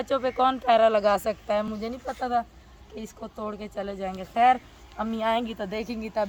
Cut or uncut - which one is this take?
uncut